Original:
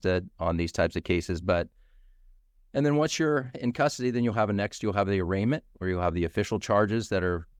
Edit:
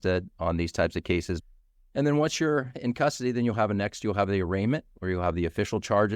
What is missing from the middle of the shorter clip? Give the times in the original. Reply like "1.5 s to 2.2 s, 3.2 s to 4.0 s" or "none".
1.4 s to 2.2 s